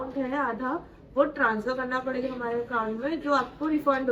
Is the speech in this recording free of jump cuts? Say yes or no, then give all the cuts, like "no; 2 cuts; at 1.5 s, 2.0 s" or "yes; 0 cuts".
yes; 0 cuts